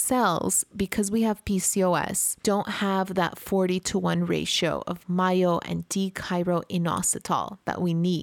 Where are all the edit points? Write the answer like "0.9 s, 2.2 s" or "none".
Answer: none